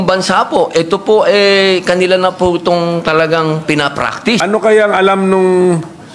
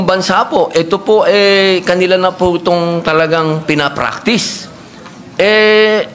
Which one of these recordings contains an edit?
first; 1 cut; at 4.4 s

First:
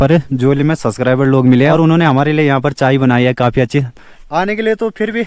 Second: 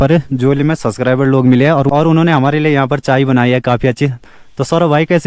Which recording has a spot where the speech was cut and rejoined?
first; 2 cuts; at 1.7 s, 4.2 s

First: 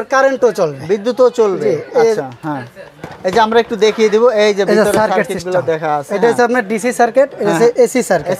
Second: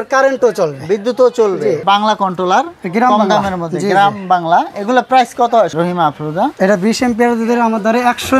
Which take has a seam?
second; 2 cuts; at 1.8 s, 5.7 s

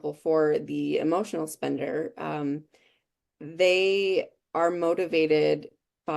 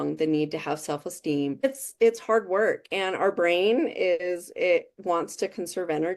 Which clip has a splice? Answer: second; 1 cut; at 1.6 s

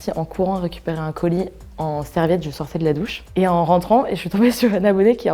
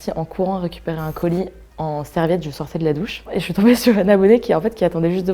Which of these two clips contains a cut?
second; 1 cut; at 3.3 s

